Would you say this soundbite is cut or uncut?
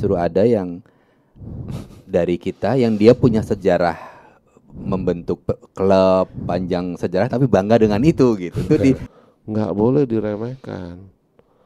cut